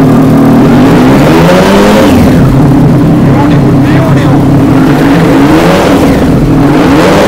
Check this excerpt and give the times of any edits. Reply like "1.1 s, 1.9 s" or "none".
none